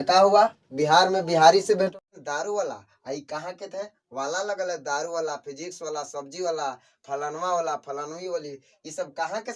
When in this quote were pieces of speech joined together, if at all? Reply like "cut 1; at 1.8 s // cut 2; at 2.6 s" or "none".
cut 1; at 1.9 s

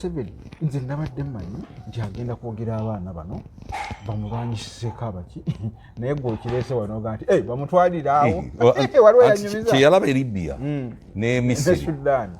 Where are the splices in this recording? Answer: none

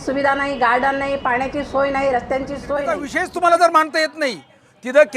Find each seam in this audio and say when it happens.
cut 1; at 3.1 s

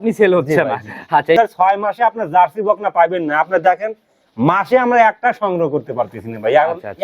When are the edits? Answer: cut 1; at 1.4 s

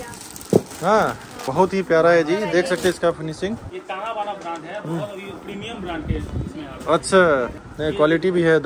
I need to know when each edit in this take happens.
cut 1; at 1.4 s // cut 2; at 3.7 s // cut 3; at 7.6 s

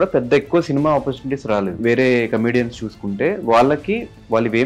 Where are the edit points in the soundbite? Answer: cut 1; at 1.8 s

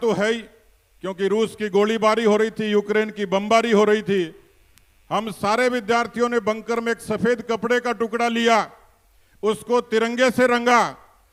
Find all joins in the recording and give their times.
none

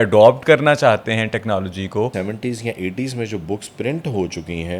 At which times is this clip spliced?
cut 1; at 2.1 s

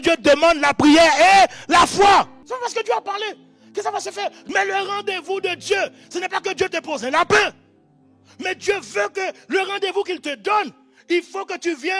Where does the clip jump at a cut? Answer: cut 1; at 2.4 s // cut 2; at 4.4 s

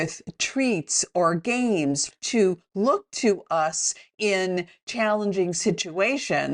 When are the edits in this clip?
cut 1; at 2.1 s

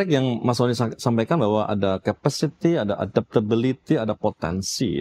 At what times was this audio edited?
none

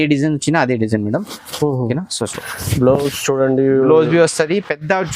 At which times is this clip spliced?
cut 1; at 2.4 s

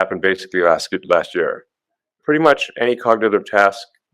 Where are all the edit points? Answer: cut 1; at 2.1 s

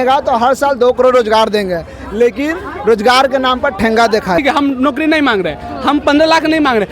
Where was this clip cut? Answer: cut 1; at 4.4 s

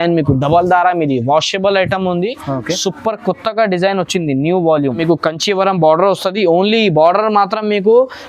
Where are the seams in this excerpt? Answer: cut 1; at 5.0 s

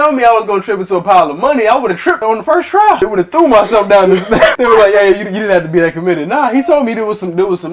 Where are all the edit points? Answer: cut 1; at 2.2 s // cut 2; at 3.0 s // cut 3; at 4.6 s

